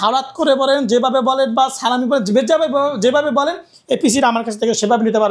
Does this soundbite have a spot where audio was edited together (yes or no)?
no